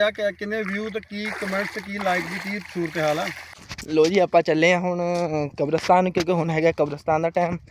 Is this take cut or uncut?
cut